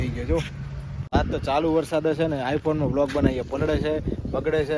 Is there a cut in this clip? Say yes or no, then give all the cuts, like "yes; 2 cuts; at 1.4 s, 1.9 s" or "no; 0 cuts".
yes; 1 cut; at 1.1 s